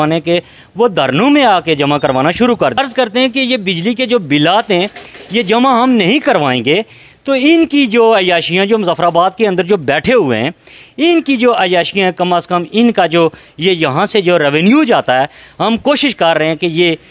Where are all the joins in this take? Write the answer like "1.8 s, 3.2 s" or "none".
2.8 s